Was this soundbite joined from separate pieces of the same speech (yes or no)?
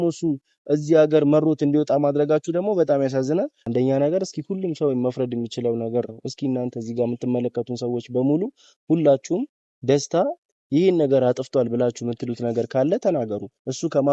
yes